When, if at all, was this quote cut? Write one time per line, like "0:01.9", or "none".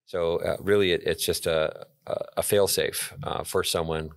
none

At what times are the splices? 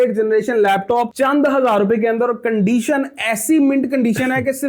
none

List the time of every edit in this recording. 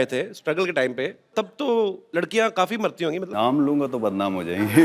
0:01.3
0:02.0
0:03.3

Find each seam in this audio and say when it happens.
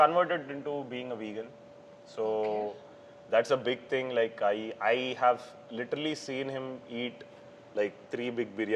none

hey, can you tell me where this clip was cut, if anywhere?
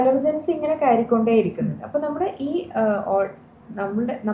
none

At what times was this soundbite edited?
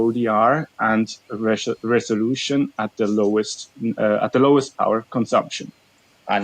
none

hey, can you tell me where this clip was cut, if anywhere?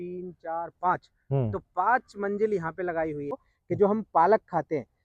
0:03.5

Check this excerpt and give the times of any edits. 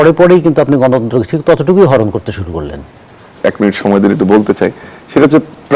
0:03.3

